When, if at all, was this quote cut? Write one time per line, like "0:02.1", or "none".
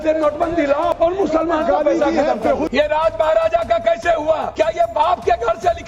0:00.9
0:02.7
0:04.5